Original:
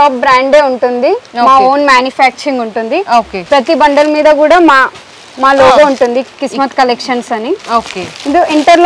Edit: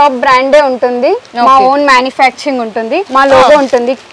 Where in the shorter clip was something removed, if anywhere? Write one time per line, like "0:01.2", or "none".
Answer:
0:03.0